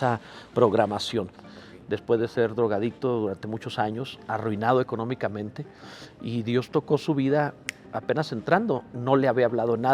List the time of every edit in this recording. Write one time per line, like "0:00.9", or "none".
0:01.3